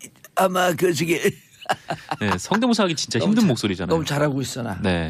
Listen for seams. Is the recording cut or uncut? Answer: uncut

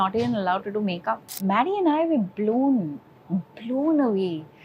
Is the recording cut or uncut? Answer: cut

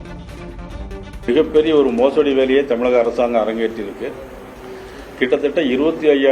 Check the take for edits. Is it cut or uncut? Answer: cut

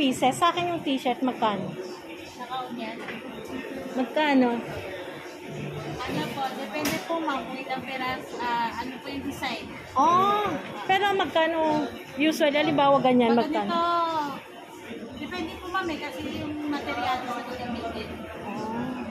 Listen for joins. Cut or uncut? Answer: uncut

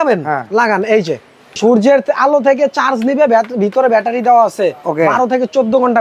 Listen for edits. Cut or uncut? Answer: cut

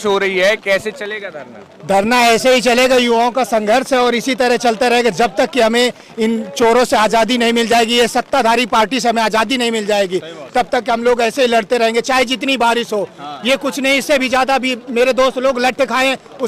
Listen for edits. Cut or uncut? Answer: uncut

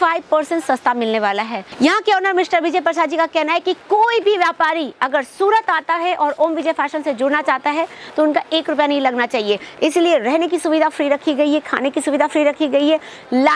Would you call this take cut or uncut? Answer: cut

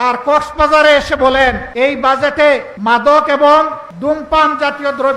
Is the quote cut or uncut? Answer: cut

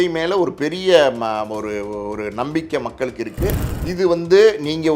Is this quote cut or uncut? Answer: cut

